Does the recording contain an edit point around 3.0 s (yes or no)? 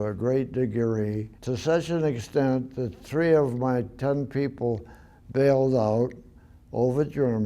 no